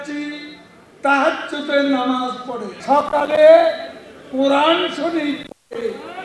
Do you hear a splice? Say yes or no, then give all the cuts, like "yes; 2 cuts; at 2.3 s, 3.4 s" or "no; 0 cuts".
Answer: yes; 1 cut; at 2.7 s